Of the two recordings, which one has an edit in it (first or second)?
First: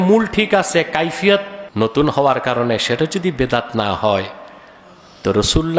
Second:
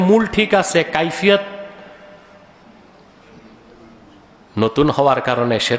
first